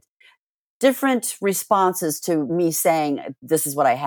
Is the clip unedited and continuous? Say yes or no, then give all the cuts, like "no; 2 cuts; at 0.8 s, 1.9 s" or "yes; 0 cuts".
no; 1 cut; at 2.5 s